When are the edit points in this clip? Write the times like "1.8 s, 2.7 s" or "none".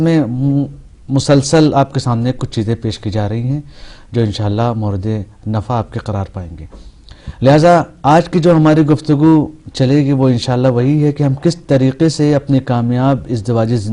11.6 s